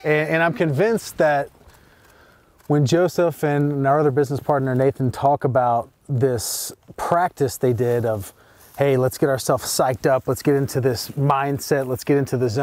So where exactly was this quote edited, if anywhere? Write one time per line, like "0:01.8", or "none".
none

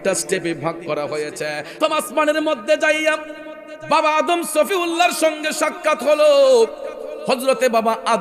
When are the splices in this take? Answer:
0:01.8

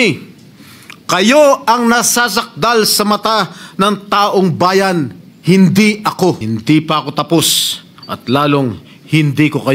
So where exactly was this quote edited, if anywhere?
0:06.4

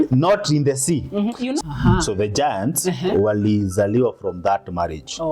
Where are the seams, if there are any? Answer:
0:01.6

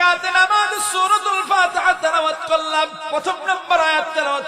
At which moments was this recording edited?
0:03.0

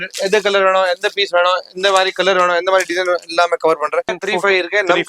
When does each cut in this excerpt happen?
0:04.2

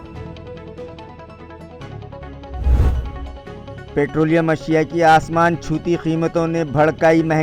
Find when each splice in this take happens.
0:03.4

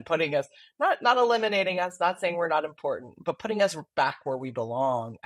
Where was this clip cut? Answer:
none

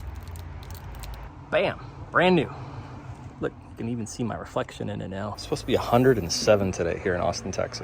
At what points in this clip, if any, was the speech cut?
0:01.3
0:05.4

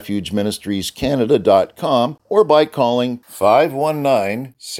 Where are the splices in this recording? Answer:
0:02.2

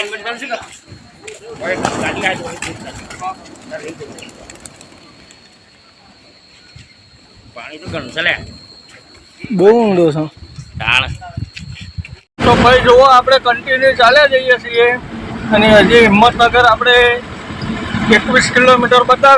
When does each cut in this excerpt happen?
0:12.3

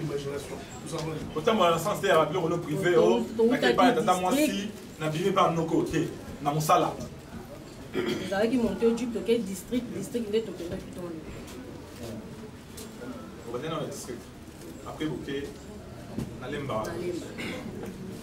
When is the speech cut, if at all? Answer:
0:01.2

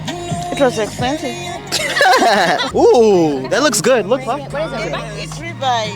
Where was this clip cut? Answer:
0:02.7

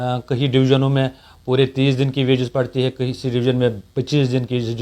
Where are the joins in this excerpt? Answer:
none

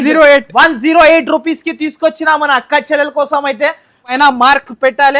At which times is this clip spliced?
0:04.1

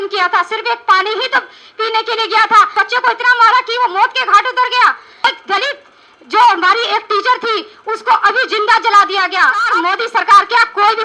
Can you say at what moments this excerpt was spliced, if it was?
0:02.7
0:05.2
0:09.7

